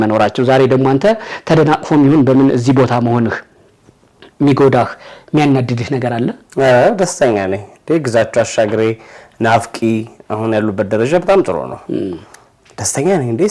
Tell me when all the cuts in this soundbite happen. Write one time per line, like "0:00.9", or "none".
none